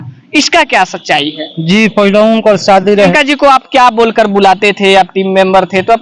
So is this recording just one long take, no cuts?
no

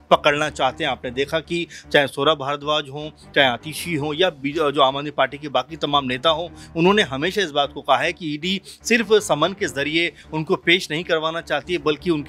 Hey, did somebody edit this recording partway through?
no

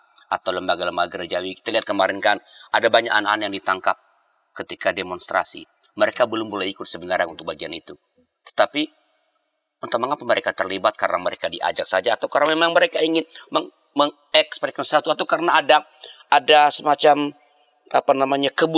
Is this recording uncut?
yes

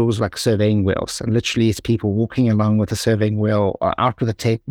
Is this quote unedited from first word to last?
yes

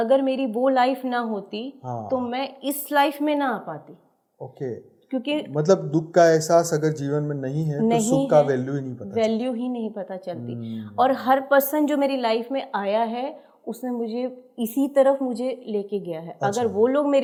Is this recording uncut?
yes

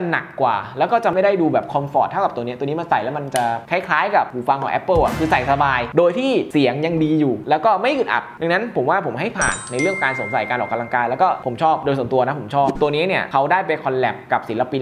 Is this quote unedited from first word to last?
no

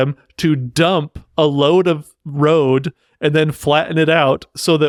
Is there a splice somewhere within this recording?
no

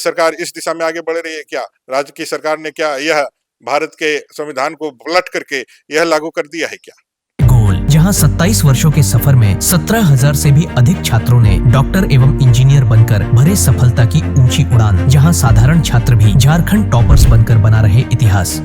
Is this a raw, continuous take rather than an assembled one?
yes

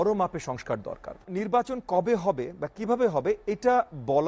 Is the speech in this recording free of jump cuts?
no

